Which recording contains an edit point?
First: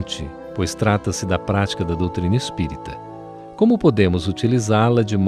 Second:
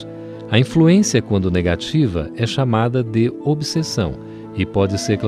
first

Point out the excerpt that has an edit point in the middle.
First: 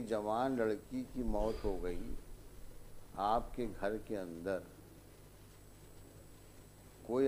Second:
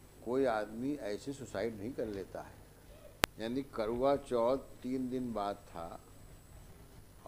second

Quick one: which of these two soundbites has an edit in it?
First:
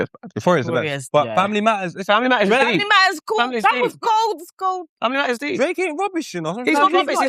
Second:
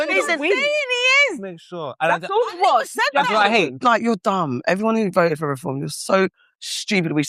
second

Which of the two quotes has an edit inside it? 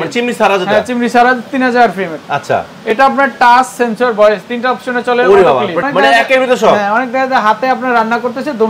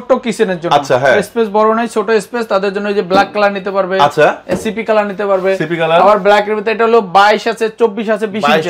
first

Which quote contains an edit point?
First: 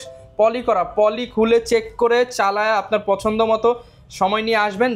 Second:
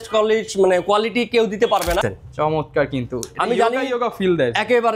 second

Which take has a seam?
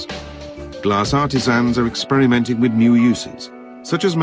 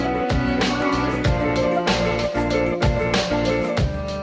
second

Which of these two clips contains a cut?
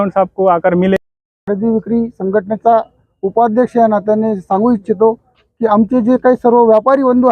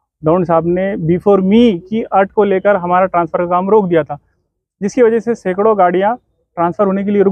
first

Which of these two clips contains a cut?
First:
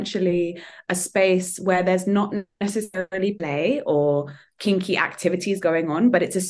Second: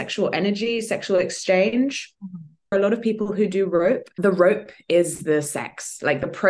second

